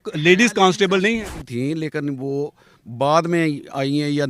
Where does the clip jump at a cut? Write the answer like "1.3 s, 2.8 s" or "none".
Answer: 1.4 s